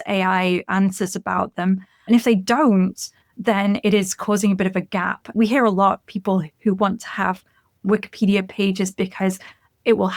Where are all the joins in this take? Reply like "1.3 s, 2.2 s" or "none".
5.3 s